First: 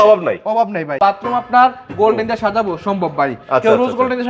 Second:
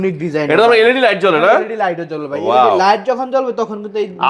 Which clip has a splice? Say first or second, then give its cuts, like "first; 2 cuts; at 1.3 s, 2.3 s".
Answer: first; 1 cut; at 0.9 s